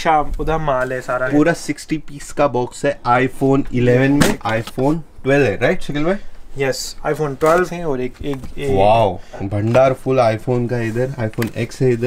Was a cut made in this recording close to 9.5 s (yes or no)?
yes